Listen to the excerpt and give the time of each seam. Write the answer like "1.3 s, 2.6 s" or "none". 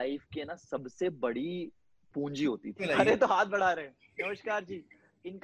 2.8 s